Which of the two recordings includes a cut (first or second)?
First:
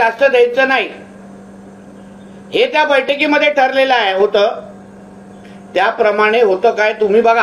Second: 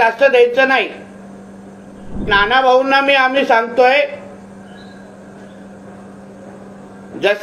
second